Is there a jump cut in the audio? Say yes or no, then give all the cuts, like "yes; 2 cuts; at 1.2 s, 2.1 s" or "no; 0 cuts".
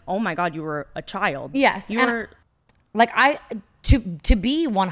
yes; 1 cut; at 2.4 s